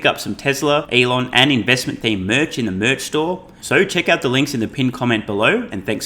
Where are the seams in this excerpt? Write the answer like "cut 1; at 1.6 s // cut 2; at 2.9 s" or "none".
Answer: cut 1; at 0.9 s // cut 2; at 3.5 s